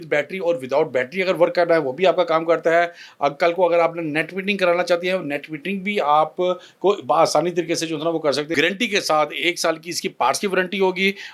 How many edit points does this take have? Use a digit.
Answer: 1